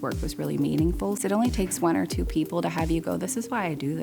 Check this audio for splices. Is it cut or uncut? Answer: cut